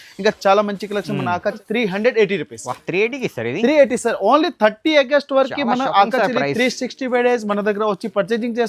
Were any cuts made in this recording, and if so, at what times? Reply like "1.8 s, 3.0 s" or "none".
1.6 s